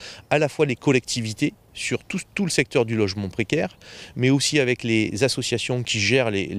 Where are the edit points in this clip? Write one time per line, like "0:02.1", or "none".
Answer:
none